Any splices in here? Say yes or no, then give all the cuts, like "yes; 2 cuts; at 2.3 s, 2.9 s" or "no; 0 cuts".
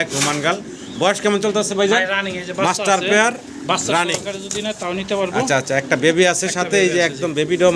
no; 0 cuts